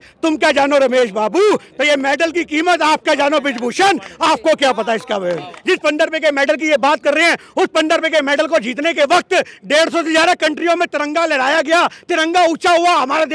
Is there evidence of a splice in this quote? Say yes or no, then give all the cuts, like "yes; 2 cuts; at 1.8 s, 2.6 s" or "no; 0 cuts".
yes; 1 cut; at 5.5 s